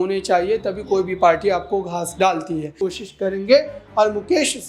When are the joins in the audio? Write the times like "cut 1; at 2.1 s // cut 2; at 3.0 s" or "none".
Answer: cut 1; at 2.7 s